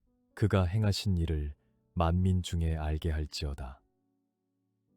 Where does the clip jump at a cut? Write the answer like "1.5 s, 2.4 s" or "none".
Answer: 3.8 s